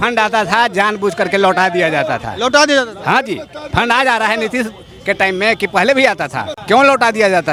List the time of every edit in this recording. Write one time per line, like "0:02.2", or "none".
none